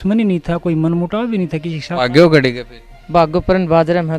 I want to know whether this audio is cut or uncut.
cut